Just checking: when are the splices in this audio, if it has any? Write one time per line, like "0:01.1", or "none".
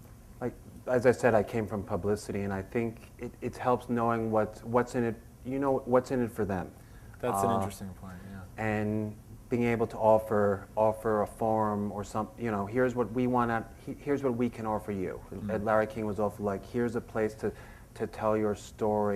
0:17.1